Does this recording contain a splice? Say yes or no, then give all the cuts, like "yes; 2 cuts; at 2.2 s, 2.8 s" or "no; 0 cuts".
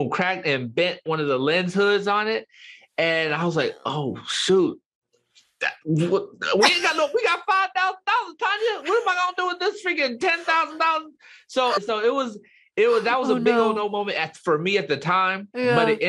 yes; 1 cut; at 1.0 s